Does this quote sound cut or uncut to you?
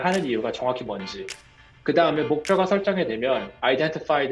uncut